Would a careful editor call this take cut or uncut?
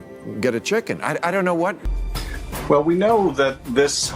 cut